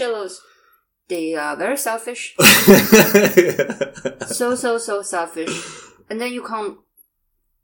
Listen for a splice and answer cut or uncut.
uncut